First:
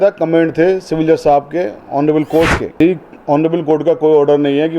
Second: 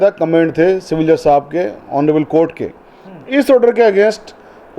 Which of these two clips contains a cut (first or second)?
first